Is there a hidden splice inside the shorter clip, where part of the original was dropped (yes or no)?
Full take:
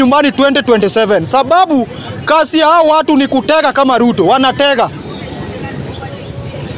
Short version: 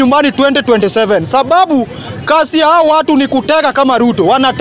no